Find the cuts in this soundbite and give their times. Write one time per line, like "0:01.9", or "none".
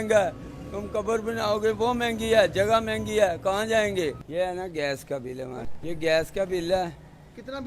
0:04.2
0:05.7